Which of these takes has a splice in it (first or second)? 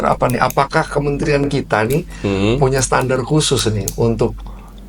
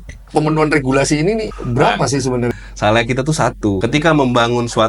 second